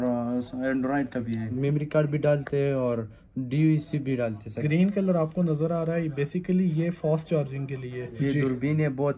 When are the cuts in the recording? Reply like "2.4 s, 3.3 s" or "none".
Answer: 1.5 s, 4.5 s, 8.0 s